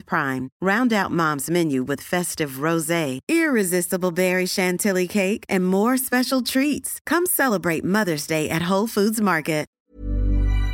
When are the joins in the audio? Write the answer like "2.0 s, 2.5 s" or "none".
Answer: 9.8 s

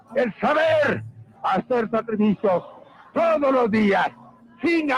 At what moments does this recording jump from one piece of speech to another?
3.6 s

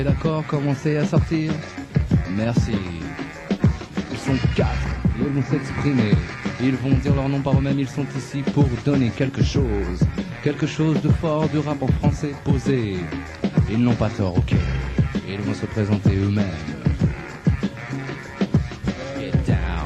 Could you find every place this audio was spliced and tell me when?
5.3 s

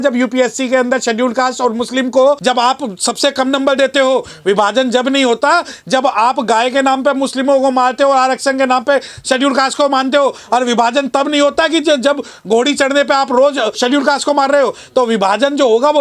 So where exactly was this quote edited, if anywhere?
2.4 s, 13.8 s

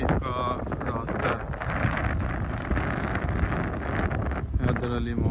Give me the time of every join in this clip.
none

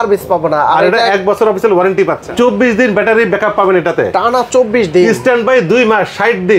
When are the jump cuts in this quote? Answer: 2.2 s

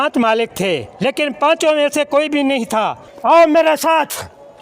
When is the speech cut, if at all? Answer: 3.1 s

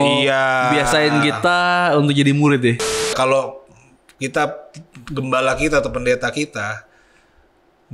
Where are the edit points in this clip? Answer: 3.1 s

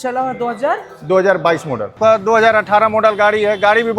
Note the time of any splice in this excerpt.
2.0 s

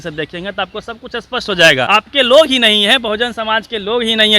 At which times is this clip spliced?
1.9 s

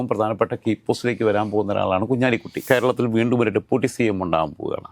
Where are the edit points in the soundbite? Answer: 2.5 s

